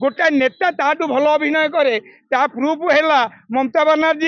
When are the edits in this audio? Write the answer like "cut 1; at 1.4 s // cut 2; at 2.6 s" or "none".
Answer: none

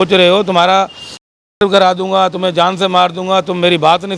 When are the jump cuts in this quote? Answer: none

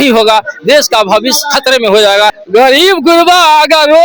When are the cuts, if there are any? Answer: cut 1; at 2.4 s

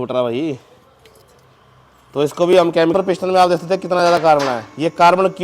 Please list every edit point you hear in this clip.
cut 1; at 2.9 s

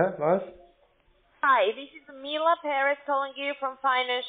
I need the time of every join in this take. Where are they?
none

